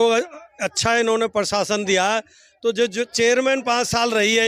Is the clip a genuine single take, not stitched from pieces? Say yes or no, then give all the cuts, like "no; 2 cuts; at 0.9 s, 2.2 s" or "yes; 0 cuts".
yes; 0 cuts